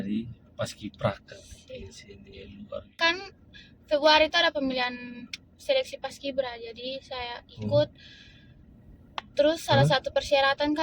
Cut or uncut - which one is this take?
cut